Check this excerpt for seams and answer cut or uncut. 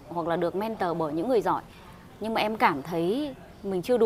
uncut